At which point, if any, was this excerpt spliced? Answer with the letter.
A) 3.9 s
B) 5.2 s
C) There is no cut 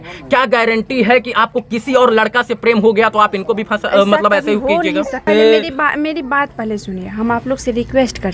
B